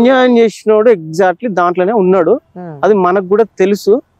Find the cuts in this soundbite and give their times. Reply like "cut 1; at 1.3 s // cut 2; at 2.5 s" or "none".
none